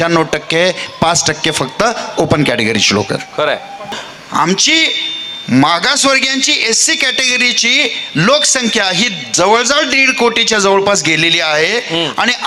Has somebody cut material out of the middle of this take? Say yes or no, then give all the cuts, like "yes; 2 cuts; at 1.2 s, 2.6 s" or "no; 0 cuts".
yes; 1 cut; at 4.0 s